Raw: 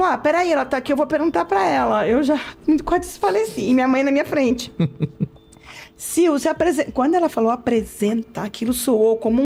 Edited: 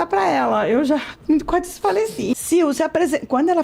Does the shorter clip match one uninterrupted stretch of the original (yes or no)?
no